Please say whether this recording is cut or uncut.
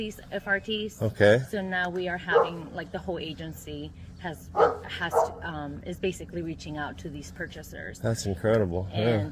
cut